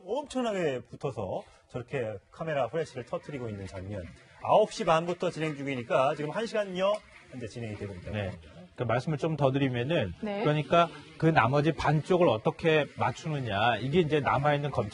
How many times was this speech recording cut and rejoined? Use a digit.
0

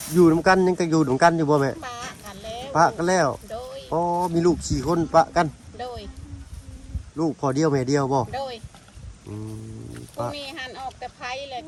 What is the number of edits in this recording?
0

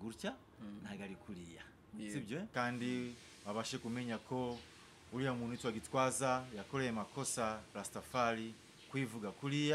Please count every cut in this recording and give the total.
1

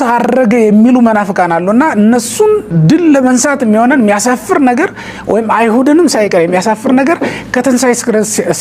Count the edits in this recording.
0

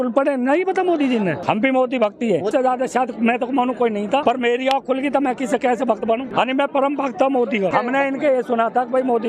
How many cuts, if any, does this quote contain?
5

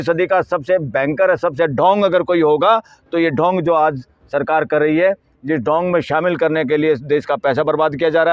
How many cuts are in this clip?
0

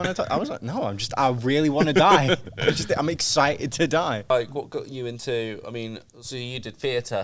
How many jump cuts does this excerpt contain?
1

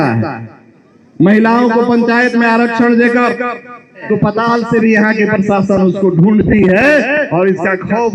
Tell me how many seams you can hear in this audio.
1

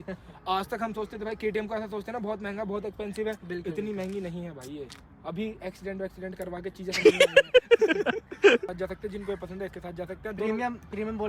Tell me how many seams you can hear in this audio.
1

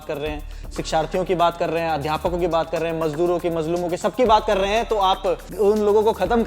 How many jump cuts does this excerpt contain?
1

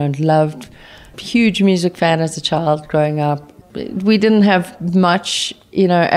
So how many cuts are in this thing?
2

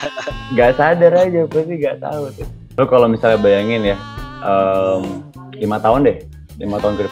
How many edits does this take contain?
1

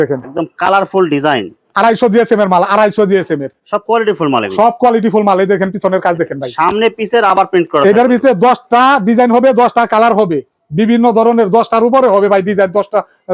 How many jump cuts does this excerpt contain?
0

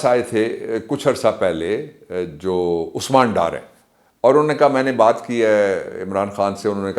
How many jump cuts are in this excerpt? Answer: 0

